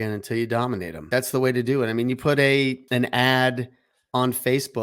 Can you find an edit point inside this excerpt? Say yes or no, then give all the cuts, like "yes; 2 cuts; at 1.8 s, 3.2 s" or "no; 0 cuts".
yes; 2 cuts; at 1.1 s, 2.8 s